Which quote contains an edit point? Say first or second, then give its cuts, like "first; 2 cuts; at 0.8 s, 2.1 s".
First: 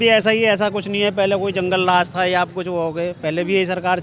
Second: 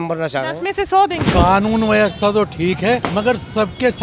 second; 2 cuts; at 1.3 s, 3.0 s